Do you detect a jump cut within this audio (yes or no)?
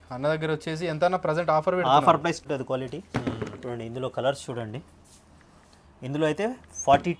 yes